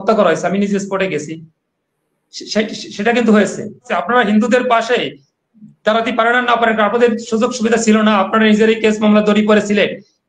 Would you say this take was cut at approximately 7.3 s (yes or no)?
no